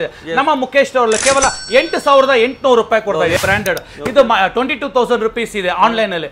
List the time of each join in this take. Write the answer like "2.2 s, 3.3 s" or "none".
3.4 s